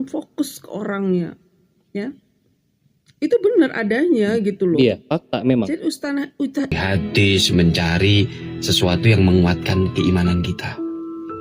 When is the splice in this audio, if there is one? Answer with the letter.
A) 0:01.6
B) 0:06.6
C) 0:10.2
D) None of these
B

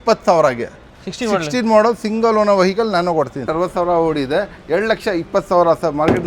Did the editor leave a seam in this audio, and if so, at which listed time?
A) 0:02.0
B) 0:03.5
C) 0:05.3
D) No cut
B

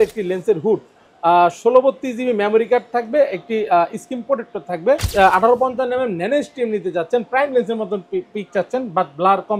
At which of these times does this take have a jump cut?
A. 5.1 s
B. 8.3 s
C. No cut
A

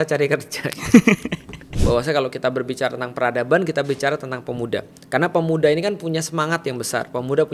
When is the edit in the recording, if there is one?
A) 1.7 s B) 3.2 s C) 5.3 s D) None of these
A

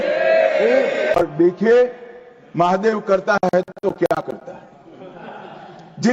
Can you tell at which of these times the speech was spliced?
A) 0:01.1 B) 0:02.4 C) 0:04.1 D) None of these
A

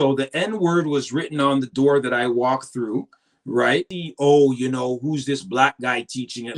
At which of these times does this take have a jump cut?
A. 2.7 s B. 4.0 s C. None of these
B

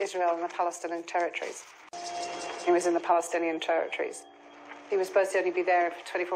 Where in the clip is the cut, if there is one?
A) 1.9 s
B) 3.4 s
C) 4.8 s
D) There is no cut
A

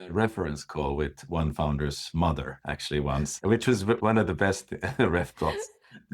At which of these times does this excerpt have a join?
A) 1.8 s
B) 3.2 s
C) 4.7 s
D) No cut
B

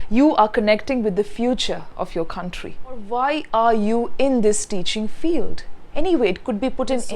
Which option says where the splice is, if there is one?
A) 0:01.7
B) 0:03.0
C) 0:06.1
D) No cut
B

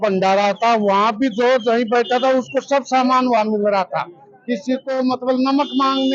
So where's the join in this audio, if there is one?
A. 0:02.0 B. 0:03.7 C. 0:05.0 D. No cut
D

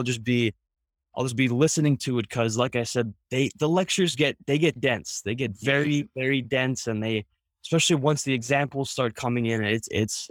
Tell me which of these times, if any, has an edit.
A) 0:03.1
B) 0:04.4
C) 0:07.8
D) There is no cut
D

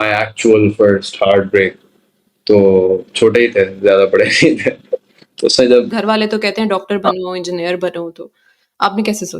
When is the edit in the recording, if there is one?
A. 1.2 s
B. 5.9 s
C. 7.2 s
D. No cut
B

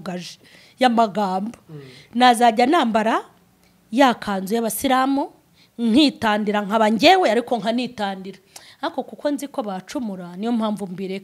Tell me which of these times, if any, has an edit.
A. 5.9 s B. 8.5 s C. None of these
C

